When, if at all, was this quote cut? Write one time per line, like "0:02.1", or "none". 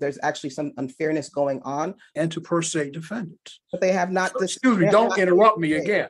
0:02.0